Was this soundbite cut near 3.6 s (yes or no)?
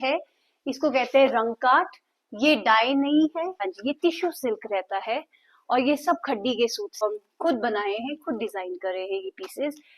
yes